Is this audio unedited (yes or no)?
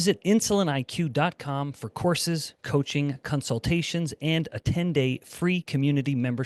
yes